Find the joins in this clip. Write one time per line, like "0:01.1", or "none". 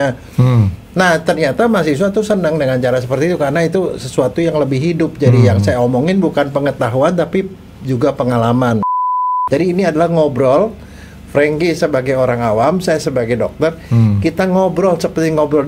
0:09.0